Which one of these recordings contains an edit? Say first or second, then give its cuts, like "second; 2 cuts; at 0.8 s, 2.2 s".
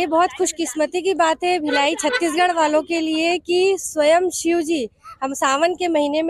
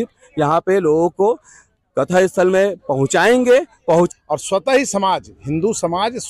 second; 1 cut; at 4.1 s